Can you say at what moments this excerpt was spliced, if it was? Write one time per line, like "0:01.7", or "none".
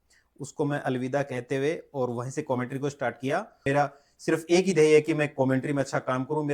0:03.7